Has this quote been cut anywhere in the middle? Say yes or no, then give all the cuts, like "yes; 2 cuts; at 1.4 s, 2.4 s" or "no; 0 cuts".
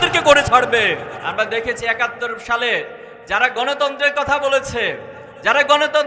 yes; 1 cut; at 1.2 s